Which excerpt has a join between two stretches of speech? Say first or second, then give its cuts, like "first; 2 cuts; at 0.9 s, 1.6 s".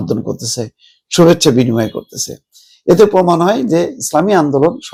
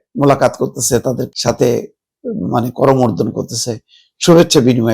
second; 1 cut; at 1.3 s